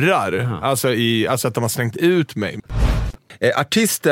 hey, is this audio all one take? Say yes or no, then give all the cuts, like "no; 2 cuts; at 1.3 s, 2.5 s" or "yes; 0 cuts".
no; 1 cut; at 3.0 s